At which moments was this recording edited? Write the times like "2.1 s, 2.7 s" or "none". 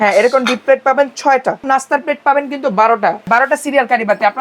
1.6 s, 3.3 s